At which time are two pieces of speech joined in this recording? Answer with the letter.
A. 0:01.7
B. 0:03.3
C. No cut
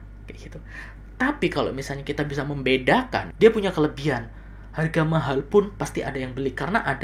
B